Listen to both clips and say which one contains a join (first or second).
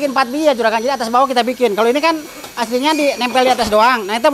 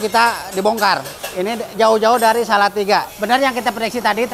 second